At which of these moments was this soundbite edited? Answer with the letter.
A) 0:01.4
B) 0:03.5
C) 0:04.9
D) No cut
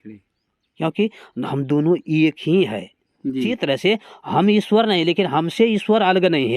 B